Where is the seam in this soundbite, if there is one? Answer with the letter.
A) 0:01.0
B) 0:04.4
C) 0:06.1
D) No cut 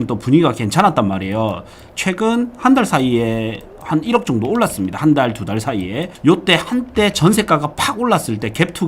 C